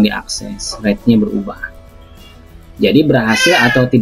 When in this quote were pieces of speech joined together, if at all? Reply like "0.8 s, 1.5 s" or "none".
none